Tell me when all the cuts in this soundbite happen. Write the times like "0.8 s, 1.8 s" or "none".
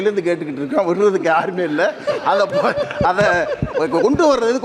none